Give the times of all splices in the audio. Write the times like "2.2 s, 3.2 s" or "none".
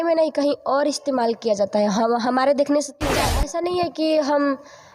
3.3 s